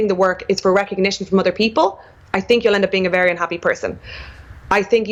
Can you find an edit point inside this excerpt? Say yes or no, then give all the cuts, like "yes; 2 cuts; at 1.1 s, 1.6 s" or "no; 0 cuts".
no; 0 cuts